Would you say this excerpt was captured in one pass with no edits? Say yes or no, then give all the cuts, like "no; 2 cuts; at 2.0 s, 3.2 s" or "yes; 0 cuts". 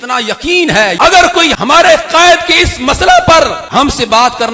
no; 2 cuts; at 1.5 s, 3.6 s